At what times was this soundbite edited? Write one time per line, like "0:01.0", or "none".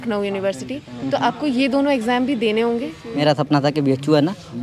0:03.2